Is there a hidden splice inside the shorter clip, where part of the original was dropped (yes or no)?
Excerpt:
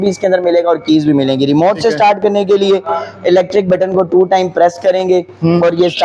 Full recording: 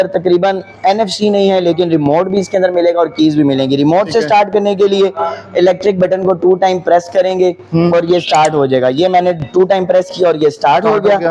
no